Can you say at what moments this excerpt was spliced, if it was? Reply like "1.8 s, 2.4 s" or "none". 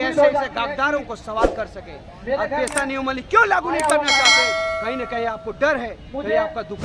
none